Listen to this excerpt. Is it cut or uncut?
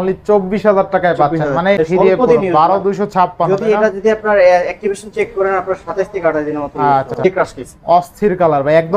cut